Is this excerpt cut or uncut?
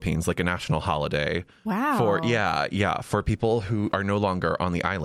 cut